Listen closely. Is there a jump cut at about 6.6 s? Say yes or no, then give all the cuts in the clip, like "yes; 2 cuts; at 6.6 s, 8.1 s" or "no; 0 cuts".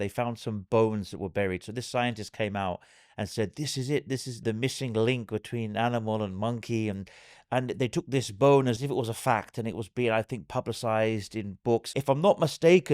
no; 3 cuts; at 4.4 s, 8.8 s, 11.8 s